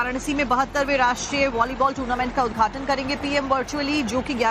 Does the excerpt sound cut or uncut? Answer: cut